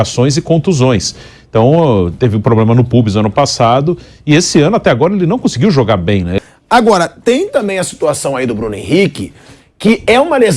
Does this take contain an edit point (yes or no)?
yes